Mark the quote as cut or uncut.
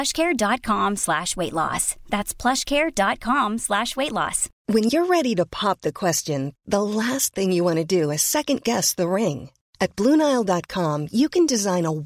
cut